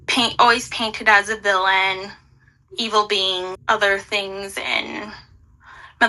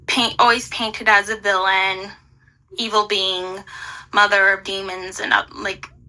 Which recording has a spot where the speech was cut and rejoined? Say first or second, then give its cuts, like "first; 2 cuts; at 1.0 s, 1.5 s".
first; 1 cut; at 3.6 s